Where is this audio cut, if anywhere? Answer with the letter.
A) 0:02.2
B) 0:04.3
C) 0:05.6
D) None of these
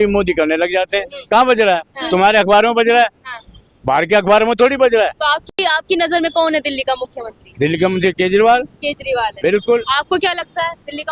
D